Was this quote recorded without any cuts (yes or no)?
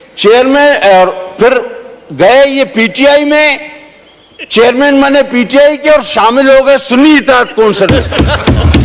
yes